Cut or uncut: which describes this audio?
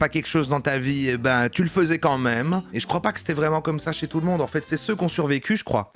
cut